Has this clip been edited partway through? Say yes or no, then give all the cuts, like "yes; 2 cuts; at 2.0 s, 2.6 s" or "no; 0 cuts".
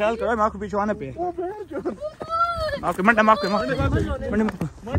no; 0 cuts